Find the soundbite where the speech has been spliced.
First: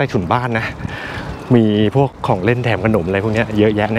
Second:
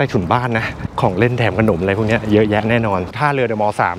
second; 2 cuts; at 0.9 s, 3.1 s

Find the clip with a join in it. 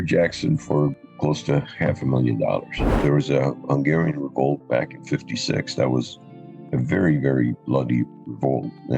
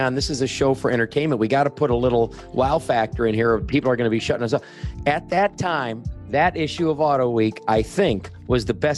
first; 1 cut; at 3.0 s

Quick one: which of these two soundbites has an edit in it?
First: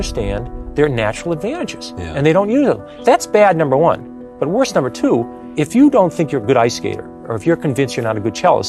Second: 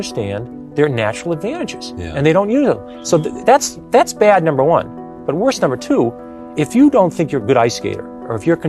first; 2 cuts; at 2.9 s, 5.4 s

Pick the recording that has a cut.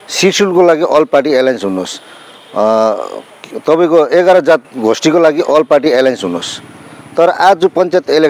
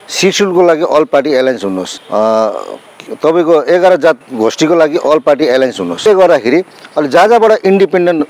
second; 2 cuts; at 1.9 s, 6.0 s

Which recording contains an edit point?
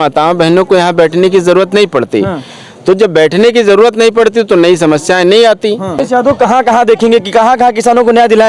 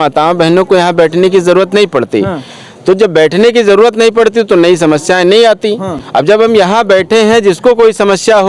first; 1 cut; at 6.1 s

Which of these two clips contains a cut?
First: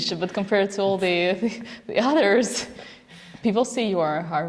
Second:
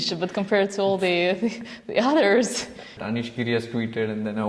second; 1 cut; at 2.9 s

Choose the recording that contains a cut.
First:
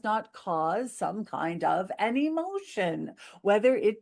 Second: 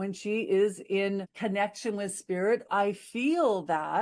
second; 2 cuts; at 1.3 s, 2.7 s

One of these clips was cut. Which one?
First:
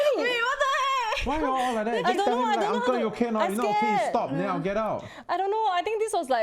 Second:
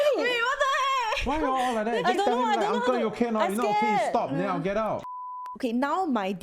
second; 1 cut; at 5.2 s

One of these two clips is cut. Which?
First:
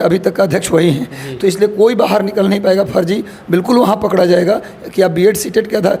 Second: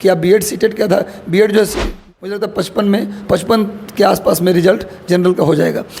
second; 1 cut; at 2.1 s

